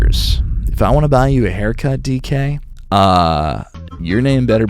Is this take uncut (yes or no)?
yes